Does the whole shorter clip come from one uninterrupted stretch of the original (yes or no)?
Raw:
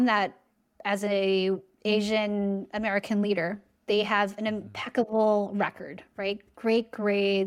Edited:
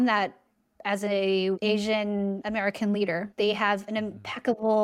no